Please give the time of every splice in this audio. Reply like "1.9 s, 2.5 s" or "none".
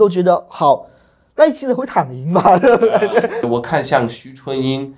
3.4 s